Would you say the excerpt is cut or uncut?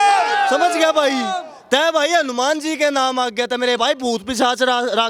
uncut